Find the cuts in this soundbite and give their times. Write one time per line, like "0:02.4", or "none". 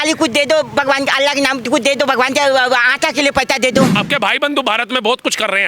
0:04.0

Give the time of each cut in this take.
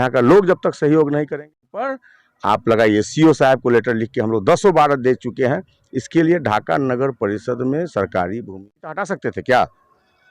0:01.7
0:08.9

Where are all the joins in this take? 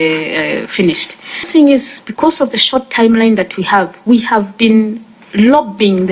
0:01.4

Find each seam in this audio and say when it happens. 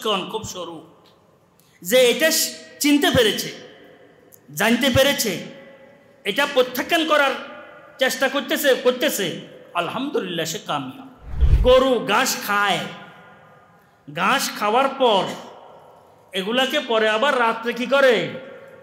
0:11.5

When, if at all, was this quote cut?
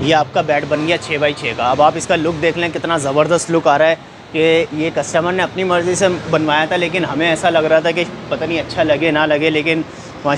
none

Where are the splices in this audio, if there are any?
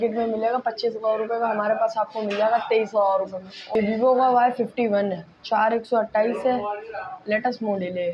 0:03.7

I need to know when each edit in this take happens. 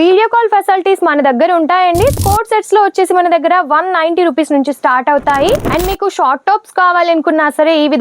0:02.2
0:05.7

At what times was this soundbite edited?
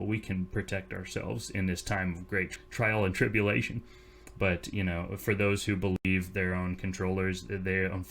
0:02.5

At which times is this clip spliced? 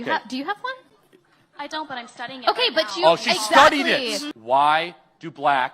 0:04.2

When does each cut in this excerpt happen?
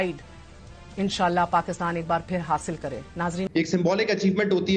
0:03.5

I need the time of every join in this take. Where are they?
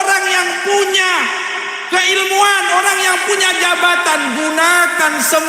none

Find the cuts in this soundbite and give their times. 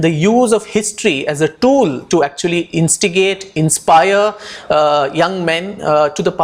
none

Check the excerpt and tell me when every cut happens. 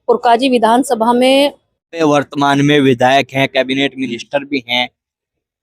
0:01.9

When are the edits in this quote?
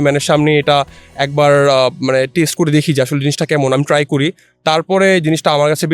none

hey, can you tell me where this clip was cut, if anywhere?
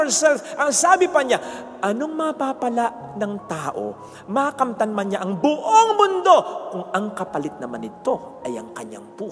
none

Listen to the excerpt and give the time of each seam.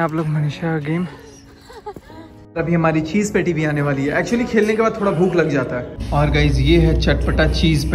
0:02.4
0:05.9

